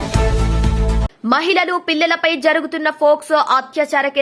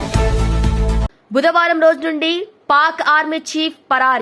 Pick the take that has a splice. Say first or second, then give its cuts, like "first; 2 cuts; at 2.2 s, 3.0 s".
second; 1 cut; at 1.1 s